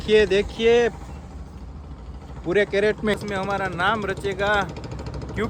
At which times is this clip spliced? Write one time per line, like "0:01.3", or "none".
0:03.2

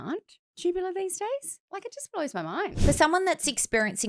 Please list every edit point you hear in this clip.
0:02.7

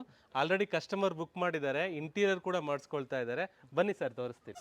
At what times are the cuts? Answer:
none

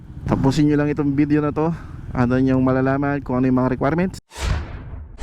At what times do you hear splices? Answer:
0:04.2

